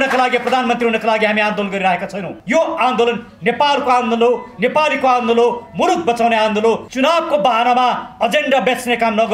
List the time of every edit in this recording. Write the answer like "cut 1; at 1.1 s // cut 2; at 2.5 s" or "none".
cut 1; at 2.3 s // cut 2; at 6.9 s

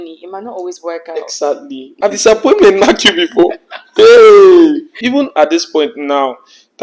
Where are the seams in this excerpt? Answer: none

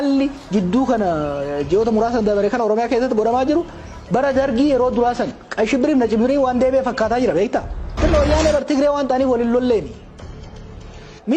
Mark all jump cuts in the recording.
cut 1; at 7.9 s

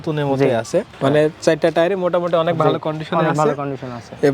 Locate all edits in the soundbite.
cut 1; at 0.9 s

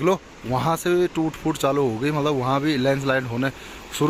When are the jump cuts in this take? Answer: none

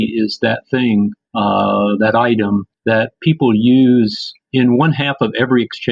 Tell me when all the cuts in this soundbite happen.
cut 1; at 1.2 s // cut 2; at 2.7 s

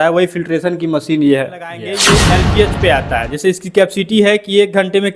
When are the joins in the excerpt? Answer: cut 1; at 2.1 s

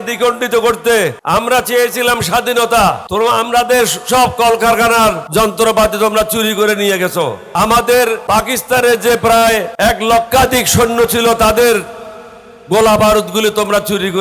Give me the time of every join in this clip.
cut 1; at 1.2 s // cut 2; at 3.0 s // cut 3; at 5.2 s // cut 4; at 7.4 s // cut 5; at 8.2 s // cut 6; at 9.7 s

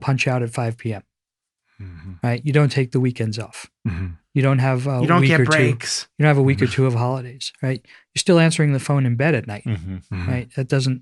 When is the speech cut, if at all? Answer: none

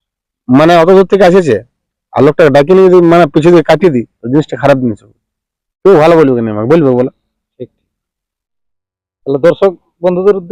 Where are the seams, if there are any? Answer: none

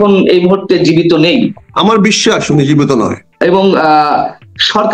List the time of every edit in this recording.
cut 1; at 1.6 s // cut 2; at 3.2 s

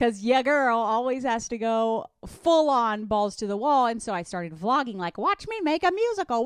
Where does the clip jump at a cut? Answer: none

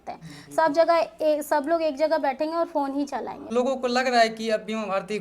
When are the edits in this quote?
cut 1; at 3.5 s

